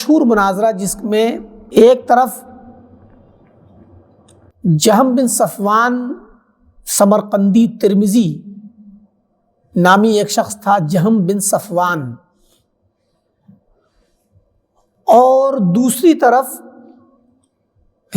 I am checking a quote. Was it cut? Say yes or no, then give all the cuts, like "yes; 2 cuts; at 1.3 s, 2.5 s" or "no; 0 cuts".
yes; 1 cut; at 1.5 s